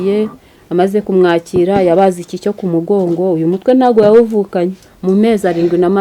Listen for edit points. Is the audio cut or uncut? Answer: cut